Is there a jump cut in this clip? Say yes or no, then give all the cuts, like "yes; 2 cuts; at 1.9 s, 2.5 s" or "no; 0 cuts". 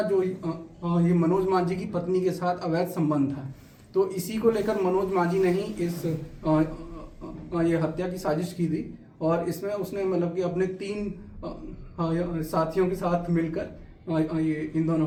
no; 0 cuts